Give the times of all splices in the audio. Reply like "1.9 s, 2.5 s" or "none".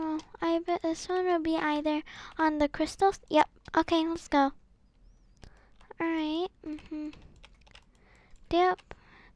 none